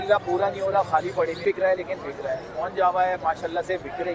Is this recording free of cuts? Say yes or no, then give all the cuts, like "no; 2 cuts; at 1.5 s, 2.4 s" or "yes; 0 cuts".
no; 1 cut; at 1.4 s